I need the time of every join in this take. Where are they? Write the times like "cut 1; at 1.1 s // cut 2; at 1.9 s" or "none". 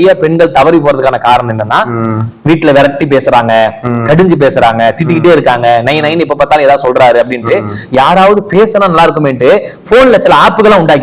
none